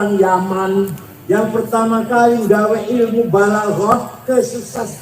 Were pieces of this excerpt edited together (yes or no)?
yes